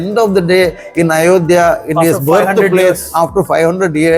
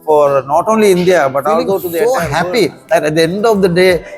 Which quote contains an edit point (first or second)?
second